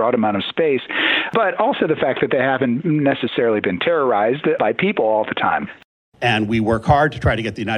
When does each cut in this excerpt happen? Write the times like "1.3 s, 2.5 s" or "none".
5.8 s